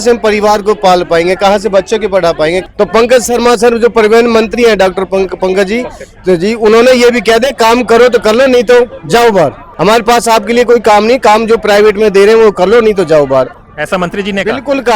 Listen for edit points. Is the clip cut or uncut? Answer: cut